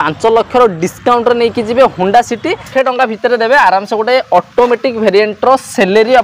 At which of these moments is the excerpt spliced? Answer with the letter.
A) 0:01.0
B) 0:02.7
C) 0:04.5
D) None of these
B